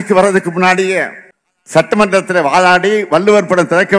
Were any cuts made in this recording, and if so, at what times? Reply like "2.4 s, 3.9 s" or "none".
1.8 s